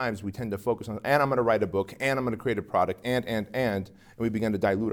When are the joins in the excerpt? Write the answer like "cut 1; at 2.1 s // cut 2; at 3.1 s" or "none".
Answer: none